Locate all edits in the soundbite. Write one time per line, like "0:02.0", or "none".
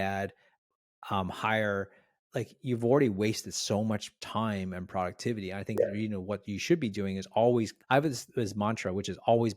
0:07.8